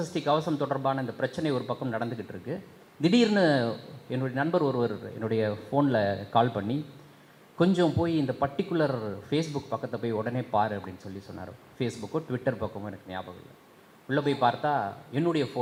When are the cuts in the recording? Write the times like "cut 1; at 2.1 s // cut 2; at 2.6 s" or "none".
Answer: none